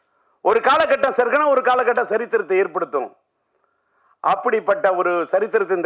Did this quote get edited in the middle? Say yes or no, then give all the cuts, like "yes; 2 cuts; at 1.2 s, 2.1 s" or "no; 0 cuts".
no; 0 cuts